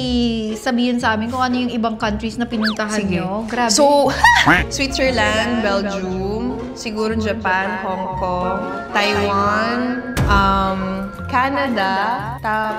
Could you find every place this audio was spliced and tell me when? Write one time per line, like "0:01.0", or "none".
none